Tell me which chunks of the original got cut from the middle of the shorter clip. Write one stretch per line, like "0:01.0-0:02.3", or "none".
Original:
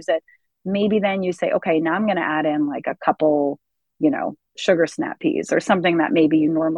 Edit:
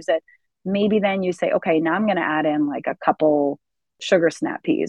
0:03.8-0:04.4